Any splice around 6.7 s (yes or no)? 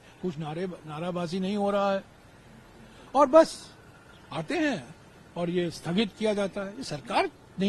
no